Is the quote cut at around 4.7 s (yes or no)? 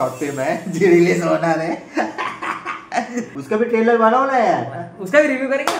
no